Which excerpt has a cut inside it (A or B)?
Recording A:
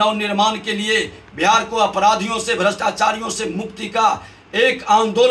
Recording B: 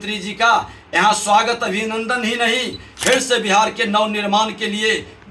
B